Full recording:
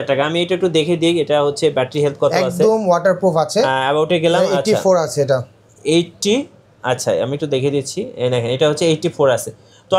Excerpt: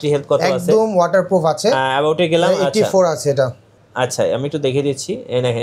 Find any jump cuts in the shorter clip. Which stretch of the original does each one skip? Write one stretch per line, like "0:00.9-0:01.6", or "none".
0:05.6-0:06.6